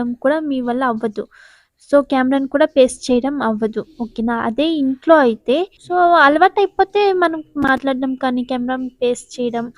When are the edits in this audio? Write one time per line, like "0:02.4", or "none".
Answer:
0:05.8